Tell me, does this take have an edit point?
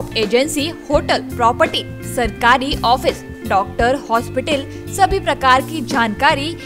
no; 0 cuts

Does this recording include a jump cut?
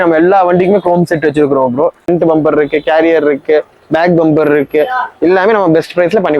yes; 1 cut; at 2.0 s

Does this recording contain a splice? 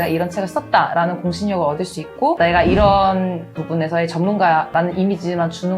yes; 1 cut; at 2.4 s

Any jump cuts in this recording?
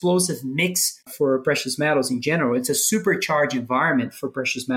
yes; 1 cut; at 1.1 s

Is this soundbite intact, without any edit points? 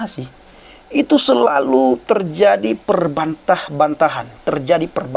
yes; 0 cuts

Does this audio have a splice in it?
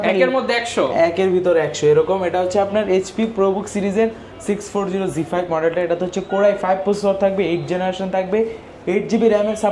no; 0 cuts

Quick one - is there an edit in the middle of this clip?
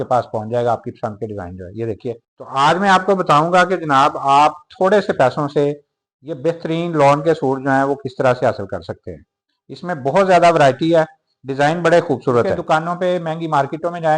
yes; 2 cuts; at 2.3 s, 12.6 s

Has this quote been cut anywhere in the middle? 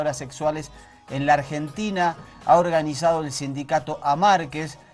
no; 0 cuts

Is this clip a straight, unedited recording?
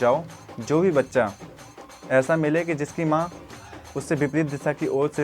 yes; 0 cuts

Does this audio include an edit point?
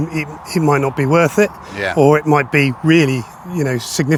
no; 0 cuts

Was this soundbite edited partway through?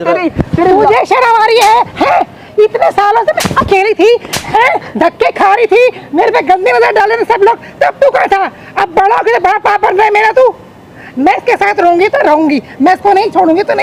no; 0 cuts

